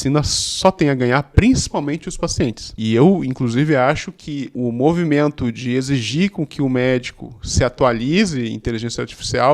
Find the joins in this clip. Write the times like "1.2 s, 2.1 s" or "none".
2.7 s, 4.5 s